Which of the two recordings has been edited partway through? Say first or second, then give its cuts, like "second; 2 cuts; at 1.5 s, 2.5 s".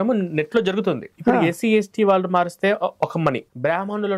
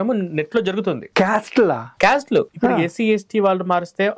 first; 1 cut; at 1.1 s